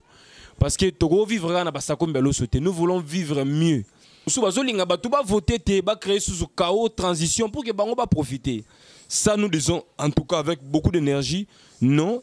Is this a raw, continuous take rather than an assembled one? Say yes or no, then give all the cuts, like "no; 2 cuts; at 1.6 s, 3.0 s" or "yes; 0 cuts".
no; 1 cut; at 4.3 s